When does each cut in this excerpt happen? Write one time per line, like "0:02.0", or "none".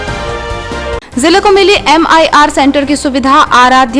0:01.0